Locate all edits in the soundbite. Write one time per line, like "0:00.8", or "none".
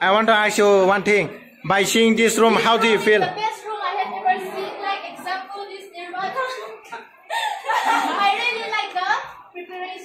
none